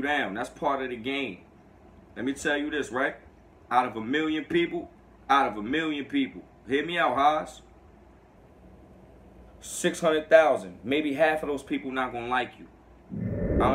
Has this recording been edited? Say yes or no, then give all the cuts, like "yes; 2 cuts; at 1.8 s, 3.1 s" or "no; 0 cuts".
no; 0 cuts